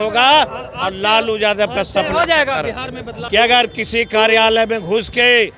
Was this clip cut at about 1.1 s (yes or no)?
no